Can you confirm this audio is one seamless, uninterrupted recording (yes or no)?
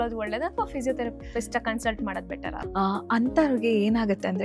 no